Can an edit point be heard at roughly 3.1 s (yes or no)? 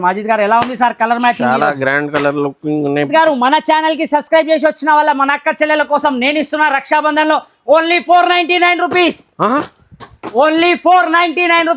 yes